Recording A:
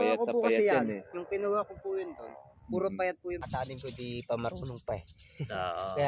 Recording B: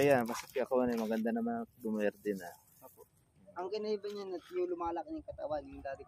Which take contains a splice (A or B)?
A